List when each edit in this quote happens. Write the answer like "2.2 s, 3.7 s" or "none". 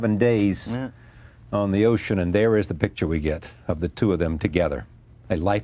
1.0 s